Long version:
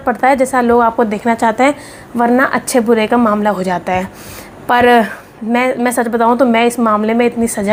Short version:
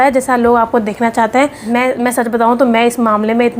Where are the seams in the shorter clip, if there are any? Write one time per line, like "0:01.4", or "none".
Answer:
0:01.6